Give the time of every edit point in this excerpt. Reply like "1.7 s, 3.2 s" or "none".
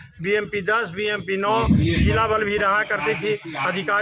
none